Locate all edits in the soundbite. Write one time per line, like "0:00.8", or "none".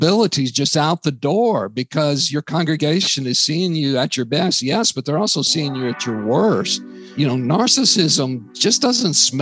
0:07.0

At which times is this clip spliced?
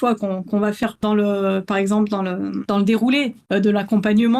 0:02.6
0:03.4

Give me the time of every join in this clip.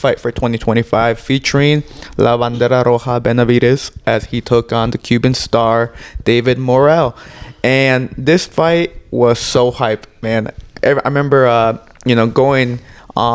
none

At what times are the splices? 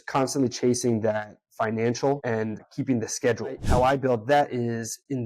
0:03.6

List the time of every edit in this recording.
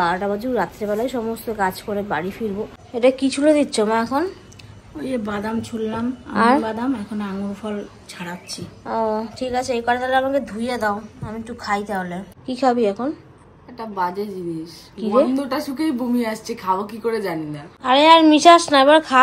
0:02.8
0:12.3
0:17.7

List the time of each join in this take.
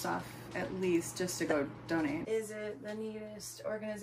0:02.2

